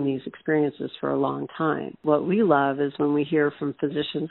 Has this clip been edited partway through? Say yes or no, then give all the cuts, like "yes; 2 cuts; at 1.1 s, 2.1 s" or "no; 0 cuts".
yes; 1 cut; at 2.0 s